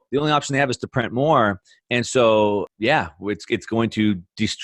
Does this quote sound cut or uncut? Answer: cut